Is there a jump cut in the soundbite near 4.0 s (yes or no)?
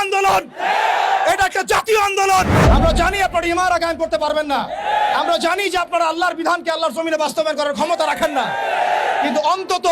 no